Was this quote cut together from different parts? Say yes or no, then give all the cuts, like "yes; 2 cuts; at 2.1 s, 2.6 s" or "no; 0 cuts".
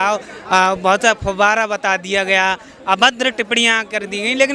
no; 0 cuts